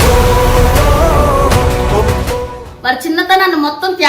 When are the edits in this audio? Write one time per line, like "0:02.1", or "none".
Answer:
0:02.7